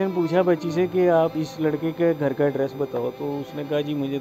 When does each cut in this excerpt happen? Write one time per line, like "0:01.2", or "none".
0:01.3